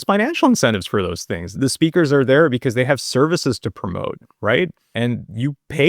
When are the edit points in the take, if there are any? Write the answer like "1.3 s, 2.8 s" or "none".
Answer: 1.6 s, 4.8 s